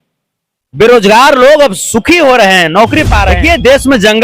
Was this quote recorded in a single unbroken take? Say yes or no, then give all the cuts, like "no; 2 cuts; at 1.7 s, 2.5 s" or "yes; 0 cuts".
no; 1 cut; at 3.3 s